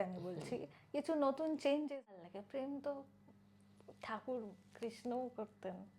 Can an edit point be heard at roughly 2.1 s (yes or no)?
yes